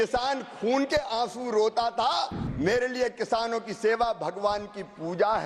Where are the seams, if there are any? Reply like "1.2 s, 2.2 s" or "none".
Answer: 2.4 s

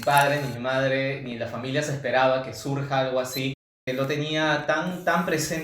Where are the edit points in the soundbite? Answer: 3.9 s

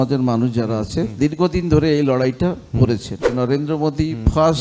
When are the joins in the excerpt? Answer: 3.3 s

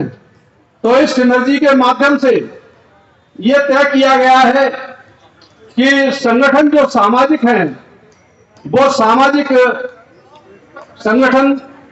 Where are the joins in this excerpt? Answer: none

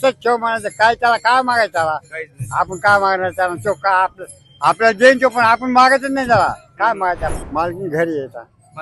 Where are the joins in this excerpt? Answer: 7.4 s

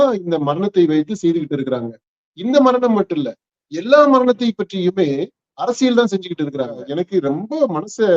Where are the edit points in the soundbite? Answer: 6.9 s

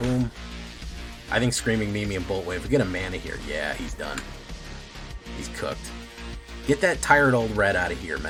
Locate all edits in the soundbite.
none

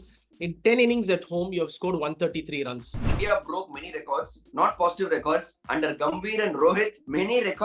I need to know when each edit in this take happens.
3.1 s

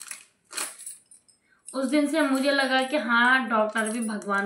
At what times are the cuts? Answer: none

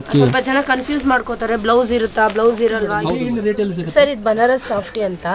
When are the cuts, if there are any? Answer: 3.2 s

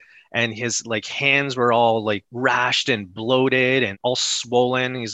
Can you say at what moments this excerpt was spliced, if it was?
2.3 s, 3.9 s

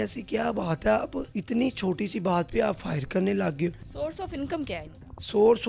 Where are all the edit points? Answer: 1.3 s, 3.8 s

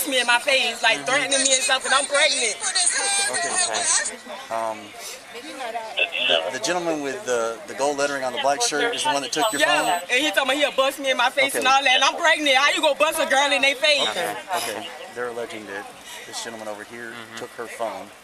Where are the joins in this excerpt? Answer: none

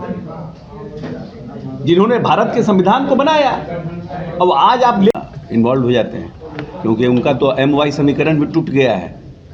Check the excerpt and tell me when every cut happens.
5.1 s

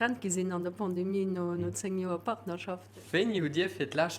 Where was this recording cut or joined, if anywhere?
2.9 s

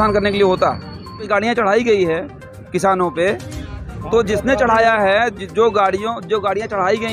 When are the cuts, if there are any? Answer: 1.3 s

